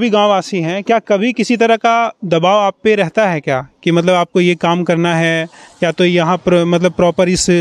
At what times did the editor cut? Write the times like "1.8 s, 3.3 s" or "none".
none